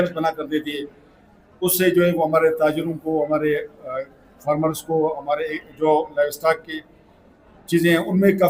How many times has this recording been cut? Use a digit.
0